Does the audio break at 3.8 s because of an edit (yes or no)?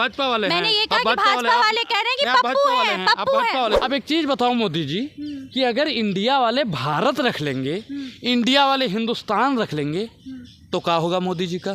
yes